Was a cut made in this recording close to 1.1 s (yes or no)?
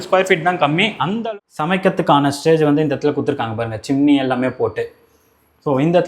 yes